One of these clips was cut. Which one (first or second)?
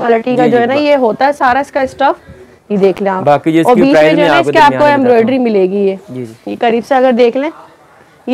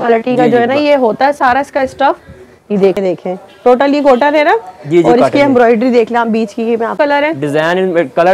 second